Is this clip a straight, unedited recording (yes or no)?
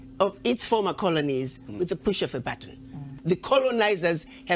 no